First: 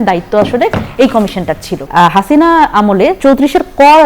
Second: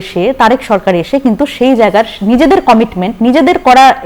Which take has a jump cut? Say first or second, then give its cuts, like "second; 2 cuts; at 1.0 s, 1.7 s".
first; 2 cuts; at 1.9 s, 3.2 s